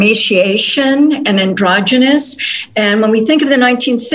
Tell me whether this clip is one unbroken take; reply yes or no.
yes